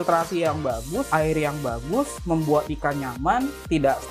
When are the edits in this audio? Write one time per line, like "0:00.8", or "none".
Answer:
0:01.1